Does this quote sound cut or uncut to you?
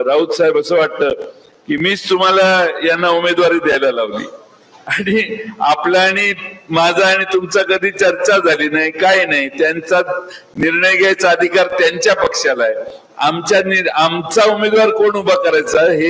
uncut